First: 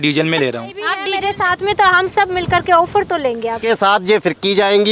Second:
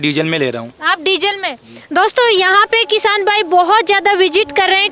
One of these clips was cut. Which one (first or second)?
first